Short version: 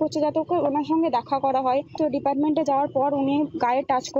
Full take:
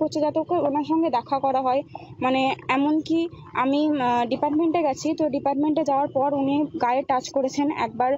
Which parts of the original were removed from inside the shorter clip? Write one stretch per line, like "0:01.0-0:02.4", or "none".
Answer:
0:02.0-0:05.2